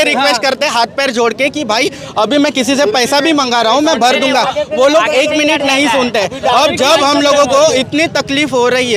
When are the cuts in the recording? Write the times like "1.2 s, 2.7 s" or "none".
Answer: none